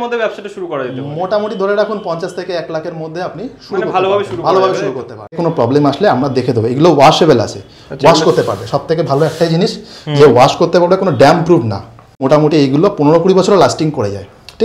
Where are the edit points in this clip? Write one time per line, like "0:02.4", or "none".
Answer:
0:05.4
0:12.2